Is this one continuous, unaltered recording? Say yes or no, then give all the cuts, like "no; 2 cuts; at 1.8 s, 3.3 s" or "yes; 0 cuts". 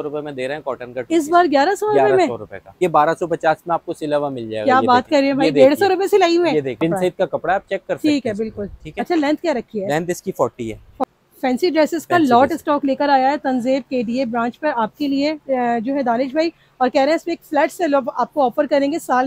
no; 3 cuts; at 2.8 s, 6.8 s, 11.0 s